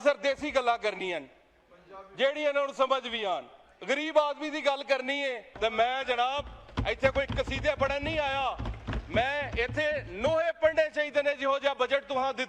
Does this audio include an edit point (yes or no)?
yes